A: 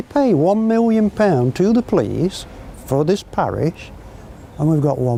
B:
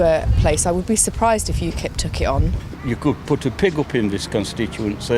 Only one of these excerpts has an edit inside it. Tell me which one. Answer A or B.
B